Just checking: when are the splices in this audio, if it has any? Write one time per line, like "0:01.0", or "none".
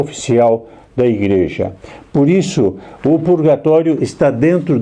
none